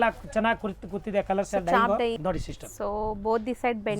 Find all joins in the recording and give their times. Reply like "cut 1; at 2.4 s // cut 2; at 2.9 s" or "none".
cut 1; at 2.2 s